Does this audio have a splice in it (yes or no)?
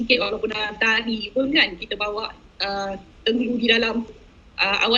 no